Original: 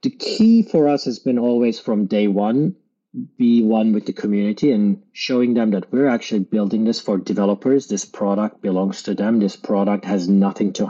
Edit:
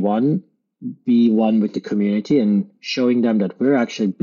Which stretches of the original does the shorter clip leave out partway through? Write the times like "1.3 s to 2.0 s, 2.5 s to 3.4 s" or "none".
none